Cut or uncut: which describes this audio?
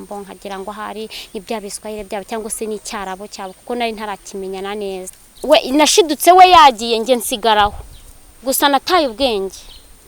cut